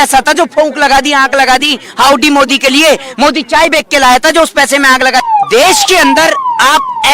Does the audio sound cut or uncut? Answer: cut